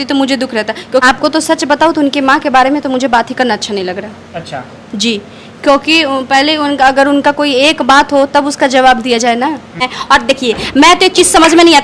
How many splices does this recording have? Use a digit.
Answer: 2